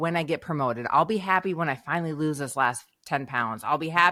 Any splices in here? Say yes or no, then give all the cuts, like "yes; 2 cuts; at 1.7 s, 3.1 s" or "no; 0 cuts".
no; 0 cuts